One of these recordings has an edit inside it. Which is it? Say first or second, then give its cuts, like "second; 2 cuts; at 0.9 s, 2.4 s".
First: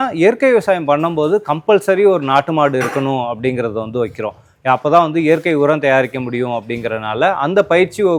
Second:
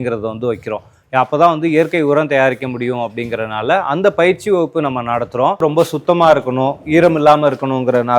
second; 1 cut; at 5.6 s